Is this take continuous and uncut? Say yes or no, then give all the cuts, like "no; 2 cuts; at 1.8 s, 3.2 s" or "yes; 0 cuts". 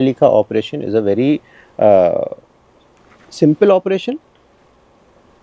yes; 0 cuts